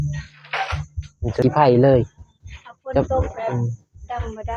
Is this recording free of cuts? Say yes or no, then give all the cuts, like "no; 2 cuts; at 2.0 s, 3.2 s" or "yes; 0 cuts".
no; 1 cut; at 1.4 s